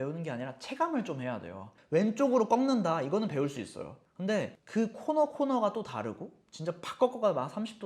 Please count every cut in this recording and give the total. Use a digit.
2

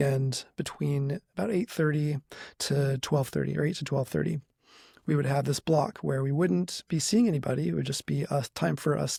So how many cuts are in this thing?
0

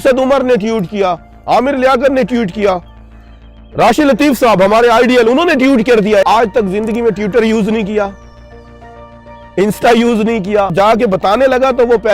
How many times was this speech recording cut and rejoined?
2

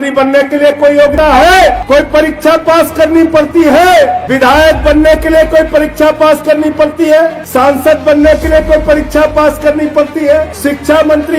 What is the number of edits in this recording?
5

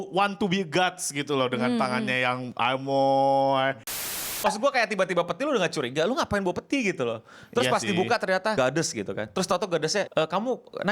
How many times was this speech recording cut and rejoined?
3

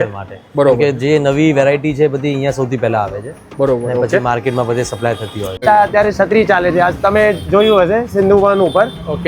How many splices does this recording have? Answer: 1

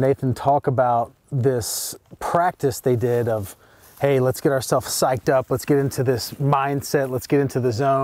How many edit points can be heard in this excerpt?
0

